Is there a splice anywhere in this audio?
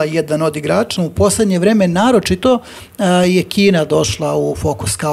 yes; 1 cut; at 0.9 s

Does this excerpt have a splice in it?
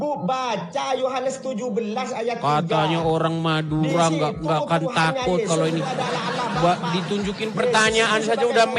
no; 0 cuts

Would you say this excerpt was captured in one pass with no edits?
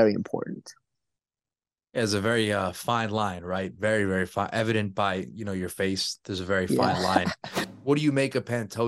no; 1 cut; at 7.6 s

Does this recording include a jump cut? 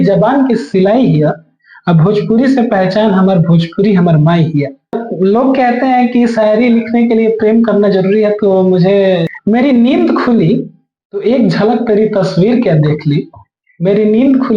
yes; 2 cuts; at 5.0 s, 9.3 s

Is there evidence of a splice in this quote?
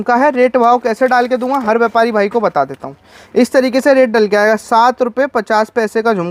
no; 0 cuts

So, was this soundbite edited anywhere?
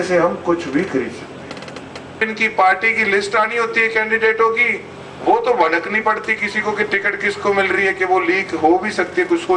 yes; 1 cut; at 2.2 s

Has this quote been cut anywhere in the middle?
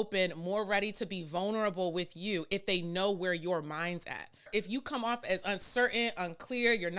yes; 1 cut; at 4.5 s

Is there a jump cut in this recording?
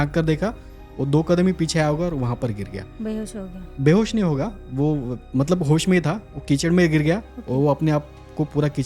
no; 0 cuts

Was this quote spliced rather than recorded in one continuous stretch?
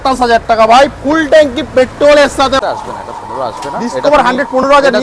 yes; 1 cut; at 2.6 s

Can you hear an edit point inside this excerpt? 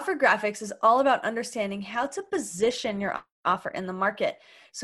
no; 0 cuts

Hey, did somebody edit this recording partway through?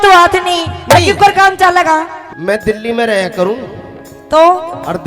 yes; 1 cut; at 2.2 s

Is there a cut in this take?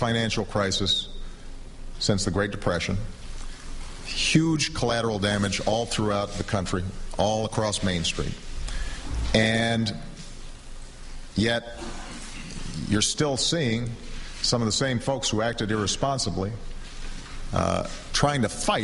yes; 1 cut; at 11.0 s

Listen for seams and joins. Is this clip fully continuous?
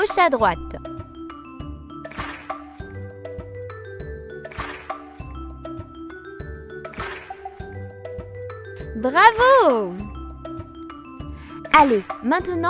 no; 2 cuts; at 7.2 s, 9.0 s

